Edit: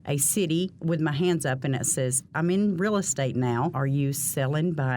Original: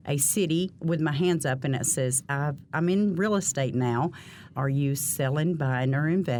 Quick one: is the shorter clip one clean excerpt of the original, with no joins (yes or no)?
no